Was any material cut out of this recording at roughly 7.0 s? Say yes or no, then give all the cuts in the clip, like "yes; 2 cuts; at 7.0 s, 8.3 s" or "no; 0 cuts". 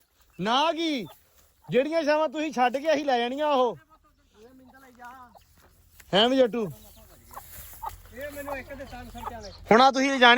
no; 0 cuts